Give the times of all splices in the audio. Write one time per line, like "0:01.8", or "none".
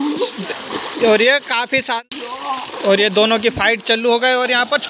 0:02.0